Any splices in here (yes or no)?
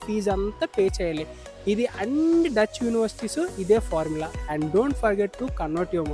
yes